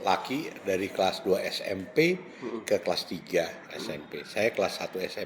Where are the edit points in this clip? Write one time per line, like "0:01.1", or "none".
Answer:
none